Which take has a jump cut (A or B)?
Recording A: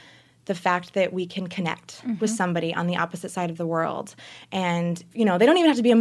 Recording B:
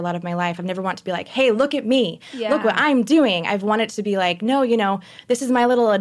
A